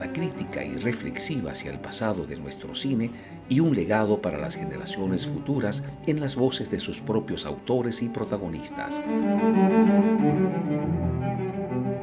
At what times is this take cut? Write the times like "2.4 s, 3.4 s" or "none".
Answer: none